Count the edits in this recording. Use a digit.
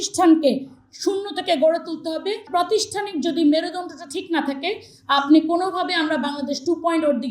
1